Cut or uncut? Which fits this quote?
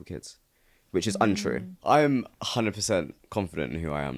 cut